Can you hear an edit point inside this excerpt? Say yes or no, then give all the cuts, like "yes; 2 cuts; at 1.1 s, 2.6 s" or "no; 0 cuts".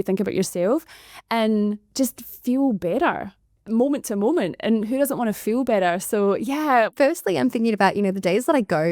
no; 0 cuts